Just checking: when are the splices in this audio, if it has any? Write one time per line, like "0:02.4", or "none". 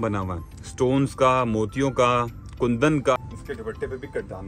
0:03.2